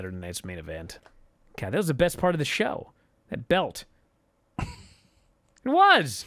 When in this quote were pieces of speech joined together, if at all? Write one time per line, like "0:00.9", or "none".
0:01.0